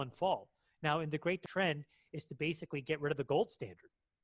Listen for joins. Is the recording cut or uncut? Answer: cut